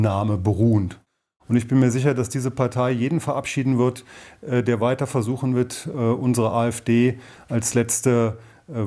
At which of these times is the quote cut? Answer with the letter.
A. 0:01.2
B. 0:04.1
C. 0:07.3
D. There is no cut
A